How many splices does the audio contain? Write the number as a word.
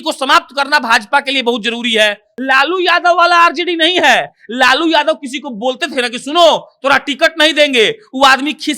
one